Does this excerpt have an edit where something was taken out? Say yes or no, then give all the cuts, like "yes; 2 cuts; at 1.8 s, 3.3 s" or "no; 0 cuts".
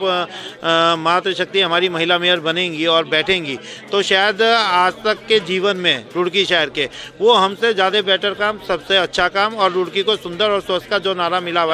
no; 0 cuts